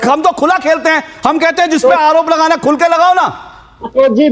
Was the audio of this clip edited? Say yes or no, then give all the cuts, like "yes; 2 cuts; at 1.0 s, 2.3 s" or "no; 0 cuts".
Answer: no; 0 cuts